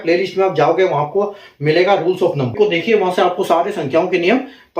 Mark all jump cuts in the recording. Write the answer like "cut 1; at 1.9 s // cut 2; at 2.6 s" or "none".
cut 1; at 2.5 s